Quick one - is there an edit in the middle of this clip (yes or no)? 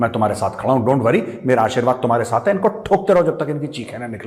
no